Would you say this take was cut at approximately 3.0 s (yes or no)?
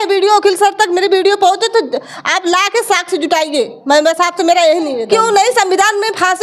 no